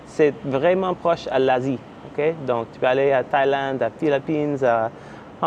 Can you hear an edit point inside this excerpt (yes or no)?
no